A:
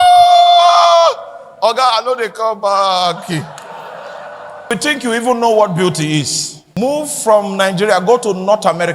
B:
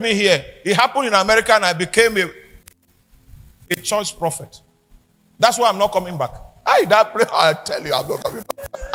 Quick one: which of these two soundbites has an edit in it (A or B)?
A